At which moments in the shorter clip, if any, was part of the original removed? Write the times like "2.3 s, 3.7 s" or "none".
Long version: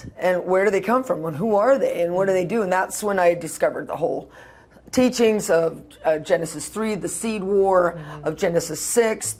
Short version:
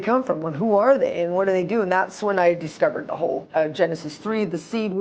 3.4 s